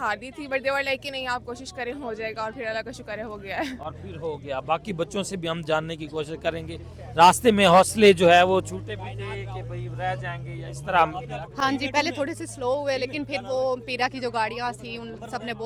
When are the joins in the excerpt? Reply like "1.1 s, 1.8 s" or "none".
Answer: none